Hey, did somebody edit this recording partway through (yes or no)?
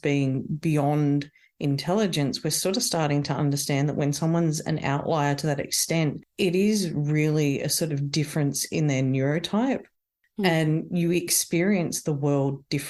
no